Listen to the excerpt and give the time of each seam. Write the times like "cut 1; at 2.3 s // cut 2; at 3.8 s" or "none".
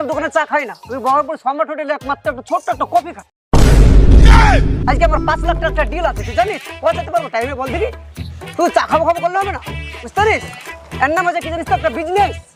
none